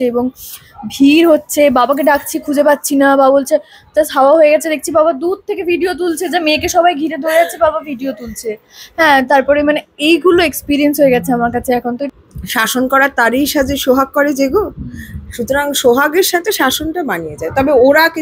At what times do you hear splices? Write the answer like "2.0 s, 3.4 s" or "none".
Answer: 12.1 s

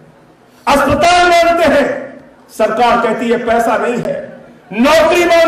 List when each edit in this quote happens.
none

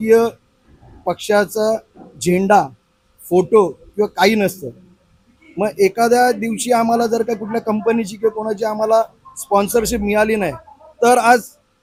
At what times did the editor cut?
none

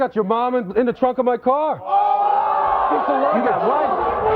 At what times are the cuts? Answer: none

